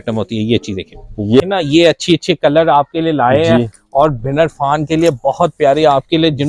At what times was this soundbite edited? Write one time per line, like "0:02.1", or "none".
0:01.4